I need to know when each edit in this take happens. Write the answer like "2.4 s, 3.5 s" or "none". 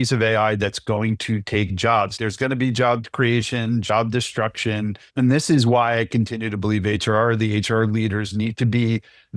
2.1 s, 3.1 s, 5.0 s